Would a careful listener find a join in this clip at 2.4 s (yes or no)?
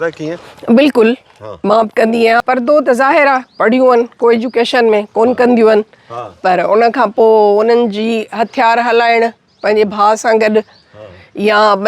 yes